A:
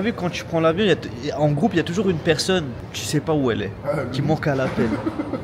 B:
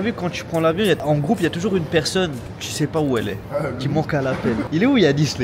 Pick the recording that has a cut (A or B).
B